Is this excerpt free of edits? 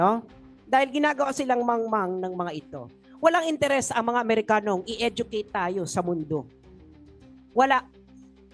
yes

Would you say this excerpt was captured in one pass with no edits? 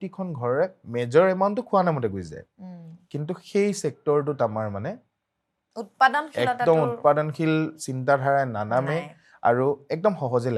yes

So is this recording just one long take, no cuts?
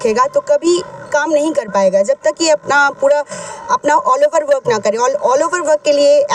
yes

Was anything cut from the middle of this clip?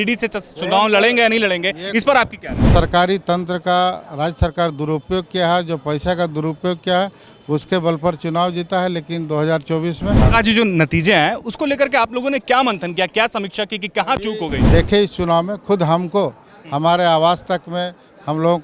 yes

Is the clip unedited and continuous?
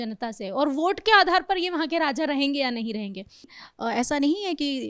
no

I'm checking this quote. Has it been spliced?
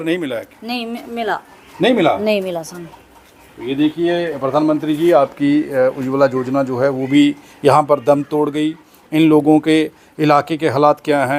no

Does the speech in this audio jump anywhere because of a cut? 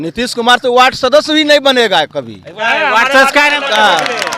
no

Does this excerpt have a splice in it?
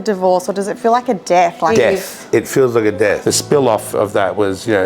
yes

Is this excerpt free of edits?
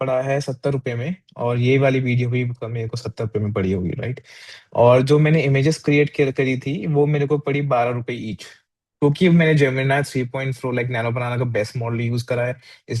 yes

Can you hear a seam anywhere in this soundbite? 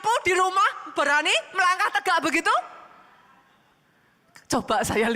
yes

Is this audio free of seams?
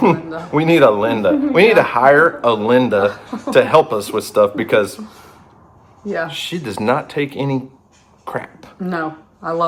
yes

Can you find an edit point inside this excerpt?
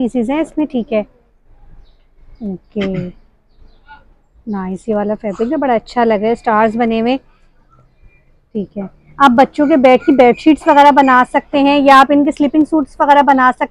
no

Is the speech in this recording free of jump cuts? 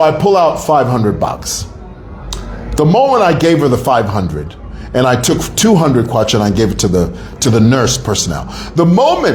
yes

